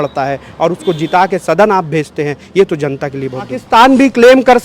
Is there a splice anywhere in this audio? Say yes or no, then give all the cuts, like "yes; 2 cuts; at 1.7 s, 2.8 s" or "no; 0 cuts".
yes; 1 cut; at 3.6 s